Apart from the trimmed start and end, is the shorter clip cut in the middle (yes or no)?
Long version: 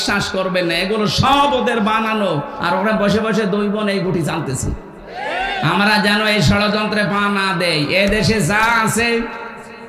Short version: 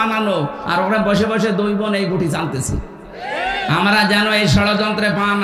no